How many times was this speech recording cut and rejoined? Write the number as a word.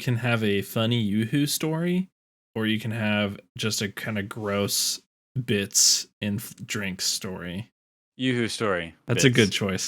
one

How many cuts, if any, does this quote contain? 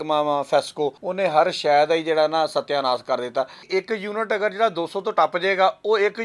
two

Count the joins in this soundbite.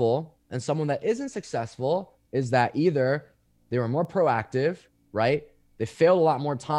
zero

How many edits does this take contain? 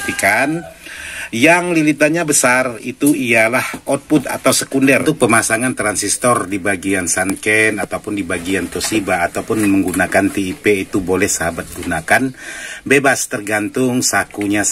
one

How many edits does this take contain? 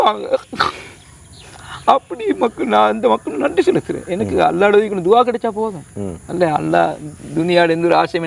zero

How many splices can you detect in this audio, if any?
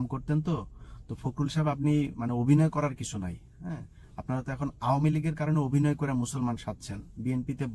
zero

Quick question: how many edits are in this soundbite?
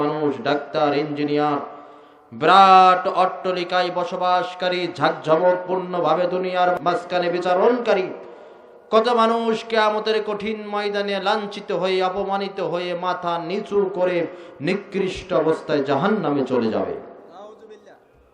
one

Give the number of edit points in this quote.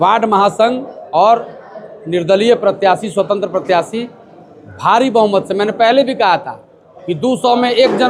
zero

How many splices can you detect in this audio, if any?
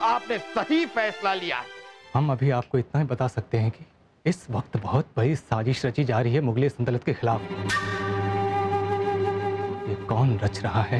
one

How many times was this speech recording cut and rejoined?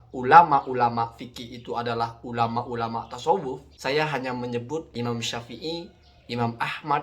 two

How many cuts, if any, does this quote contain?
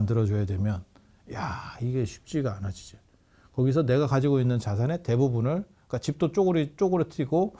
zero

